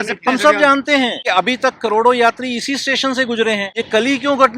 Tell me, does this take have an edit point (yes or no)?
yes